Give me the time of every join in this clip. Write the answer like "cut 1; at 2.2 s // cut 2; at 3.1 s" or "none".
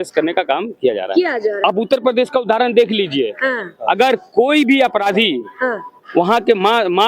cut 1; at 1.6 s

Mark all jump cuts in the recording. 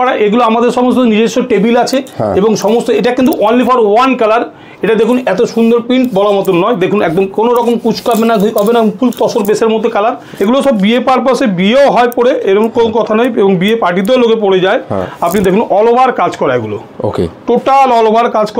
cut 1; at 10.3 s

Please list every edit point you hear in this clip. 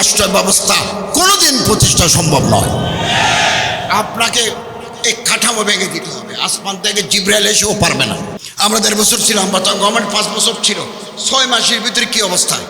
none

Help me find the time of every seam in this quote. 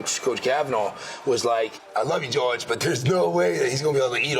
cut 1; at 1.8 s

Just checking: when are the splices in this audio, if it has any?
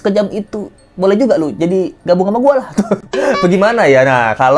none

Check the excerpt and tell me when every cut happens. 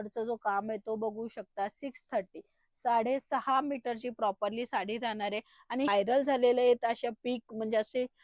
cut 1; at 5.9 s

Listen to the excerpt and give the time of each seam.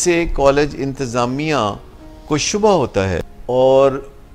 cut 1; at 3.3 s

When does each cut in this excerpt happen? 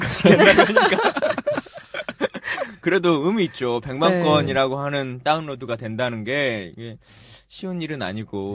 cut 1; at 4.0 s

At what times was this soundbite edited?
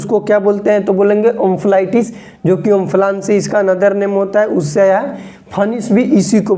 none

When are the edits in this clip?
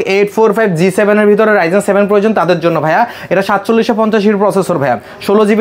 none

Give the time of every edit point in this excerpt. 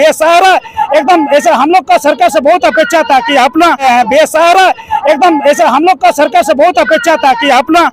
cut 1; at 3.8 s

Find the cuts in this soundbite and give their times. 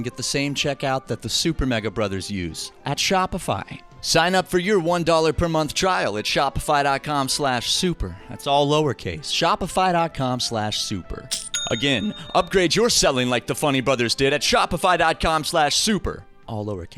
none

